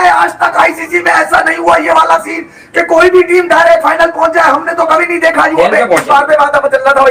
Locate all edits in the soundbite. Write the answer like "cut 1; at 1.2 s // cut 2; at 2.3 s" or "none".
none